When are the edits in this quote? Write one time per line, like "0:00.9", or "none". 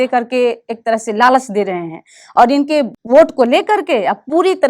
0:03.0